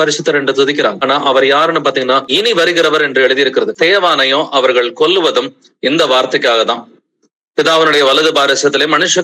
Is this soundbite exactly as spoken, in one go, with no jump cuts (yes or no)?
no